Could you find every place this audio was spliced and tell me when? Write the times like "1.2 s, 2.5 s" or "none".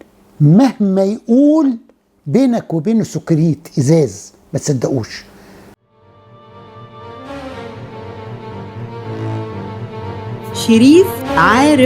5.7 s